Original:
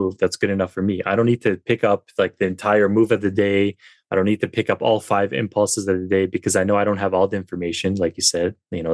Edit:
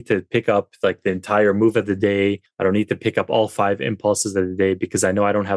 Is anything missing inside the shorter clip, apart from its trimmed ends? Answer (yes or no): yes